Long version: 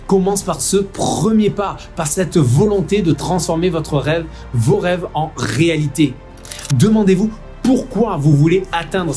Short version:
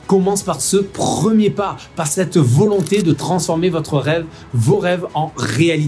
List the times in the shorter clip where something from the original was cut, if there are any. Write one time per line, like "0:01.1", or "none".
none